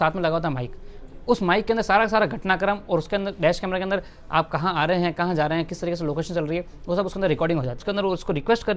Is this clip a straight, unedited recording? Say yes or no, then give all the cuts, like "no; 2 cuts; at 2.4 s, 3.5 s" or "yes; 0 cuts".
no; 1 cut; at 7.7 s